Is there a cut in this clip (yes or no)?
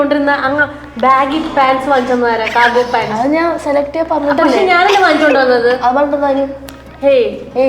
no